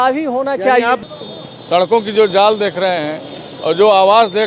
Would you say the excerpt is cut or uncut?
cut